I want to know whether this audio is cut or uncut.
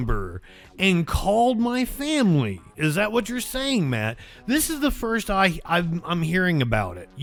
uncut